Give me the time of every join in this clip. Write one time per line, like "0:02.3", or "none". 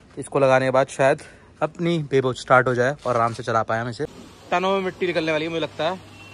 0:04.2